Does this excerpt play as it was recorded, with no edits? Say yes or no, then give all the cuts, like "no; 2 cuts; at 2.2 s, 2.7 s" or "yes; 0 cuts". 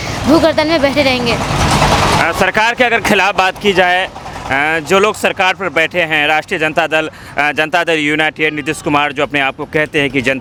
yes; 0 cuts